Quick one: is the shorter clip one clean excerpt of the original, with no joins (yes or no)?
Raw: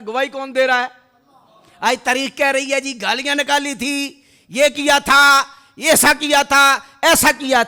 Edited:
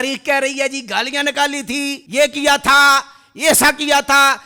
no